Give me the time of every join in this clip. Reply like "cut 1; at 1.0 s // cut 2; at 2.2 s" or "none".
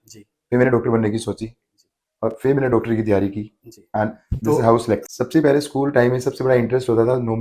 cut 1; at 5.1 s